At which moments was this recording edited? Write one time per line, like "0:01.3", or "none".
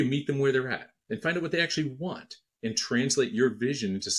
none